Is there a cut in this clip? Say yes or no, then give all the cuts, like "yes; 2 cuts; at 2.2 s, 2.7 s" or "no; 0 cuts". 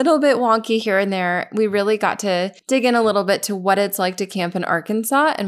yes; 1 cut; at 2.6 s